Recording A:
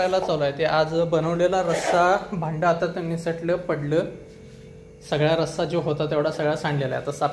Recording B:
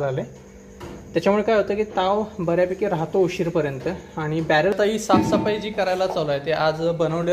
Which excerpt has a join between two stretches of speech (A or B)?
B